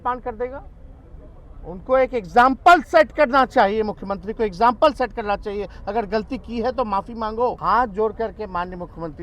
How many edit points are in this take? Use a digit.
1